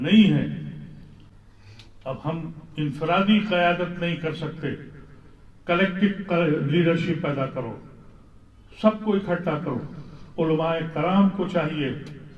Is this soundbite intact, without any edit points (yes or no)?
yes